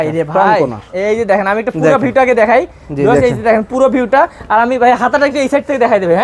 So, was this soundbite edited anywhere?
no; 0 cuts

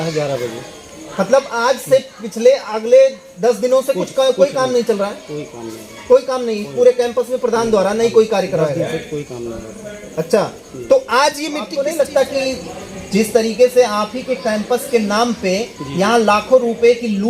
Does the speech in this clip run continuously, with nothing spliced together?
no; 1 cut; at 11.7 s

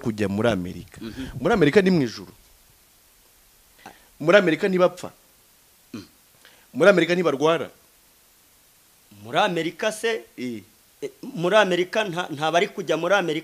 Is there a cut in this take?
no; 0 cuts

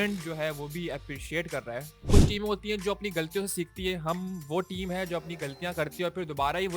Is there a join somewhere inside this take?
yes; 1 cut; at 2.1 s

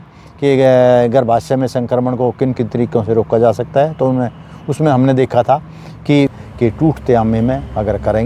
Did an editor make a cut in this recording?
yes; 1 cut; at 6.4 s

